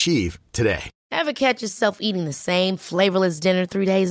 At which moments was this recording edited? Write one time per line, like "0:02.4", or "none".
none